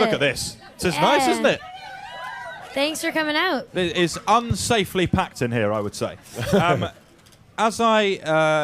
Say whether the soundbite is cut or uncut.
cut